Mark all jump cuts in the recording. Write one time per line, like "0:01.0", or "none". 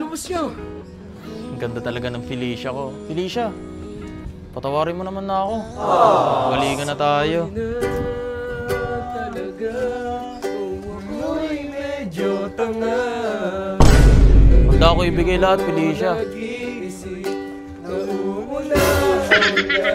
none